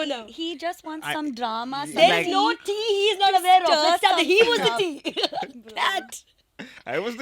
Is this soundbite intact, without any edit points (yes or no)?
yes